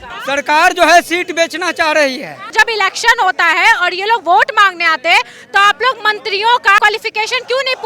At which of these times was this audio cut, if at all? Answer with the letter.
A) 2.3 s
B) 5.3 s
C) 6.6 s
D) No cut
A